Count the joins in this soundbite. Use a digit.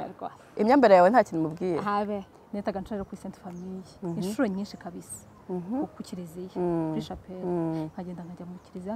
1